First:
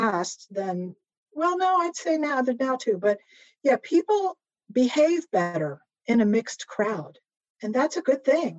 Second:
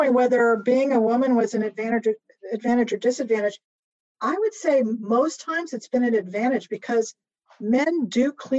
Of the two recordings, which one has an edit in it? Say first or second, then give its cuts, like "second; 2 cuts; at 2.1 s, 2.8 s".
first; 1 cut; at 1.2 s